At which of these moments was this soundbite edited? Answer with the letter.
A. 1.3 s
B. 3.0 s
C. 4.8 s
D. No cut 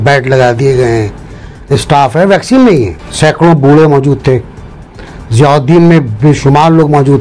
B